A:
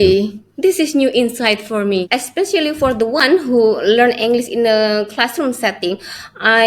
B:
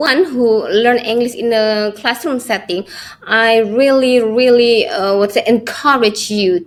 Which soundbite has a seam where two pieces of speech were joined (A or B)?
A